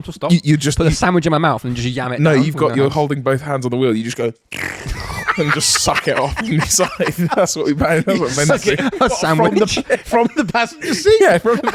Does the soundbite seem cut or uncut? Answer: uncut